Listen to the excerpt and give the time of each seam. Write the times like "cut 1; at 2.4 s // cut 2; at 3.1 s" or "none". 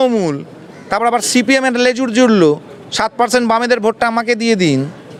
none